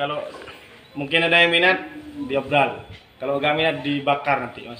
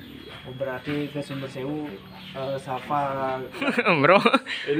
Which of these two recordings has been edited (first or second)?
second